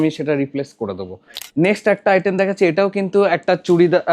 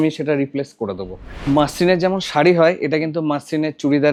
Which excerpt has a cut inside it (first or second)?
first